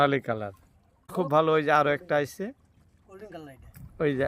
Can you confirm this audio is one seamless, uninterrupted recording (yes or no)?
no